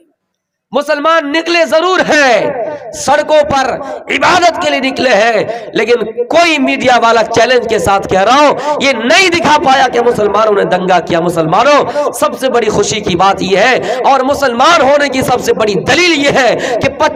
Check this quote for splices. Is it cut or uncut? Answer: uncut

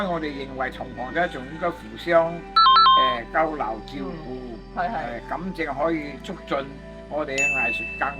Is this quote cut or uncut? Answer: uncut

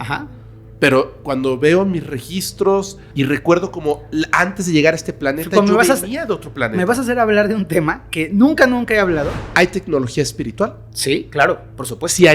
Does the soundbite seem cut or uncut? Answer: cut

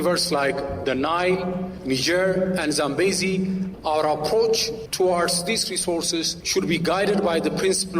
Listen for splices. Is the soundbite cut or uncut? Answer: cut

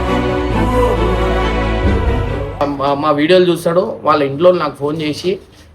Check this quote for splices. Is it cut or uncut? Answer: cut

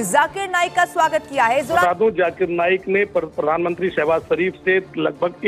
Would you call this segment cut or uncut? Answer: cut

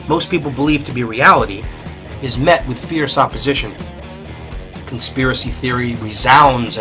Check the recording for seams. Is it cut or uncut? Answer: cut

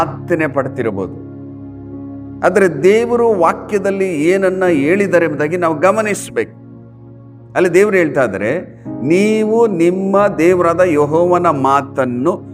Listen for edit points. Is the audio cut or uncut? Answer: uncut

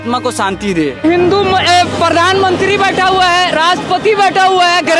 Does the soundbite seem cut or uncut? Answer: cut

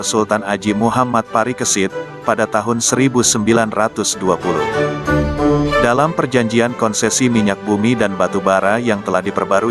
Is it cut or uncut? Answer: uncut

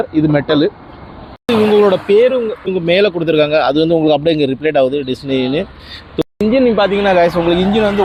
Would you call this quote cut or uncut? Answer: uncut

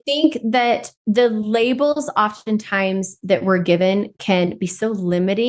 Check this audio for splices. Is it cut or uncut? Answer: cut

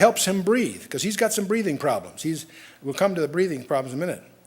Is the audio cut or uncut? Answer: cut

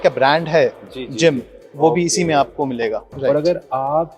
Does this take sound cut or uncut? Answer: cut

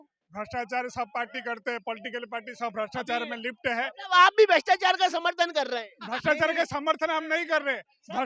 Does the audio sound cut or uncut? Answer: uncut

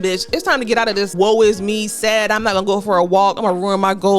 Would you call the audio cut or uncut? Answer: cut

